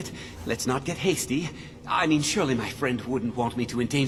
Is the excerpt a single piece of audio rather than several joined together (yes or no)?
yes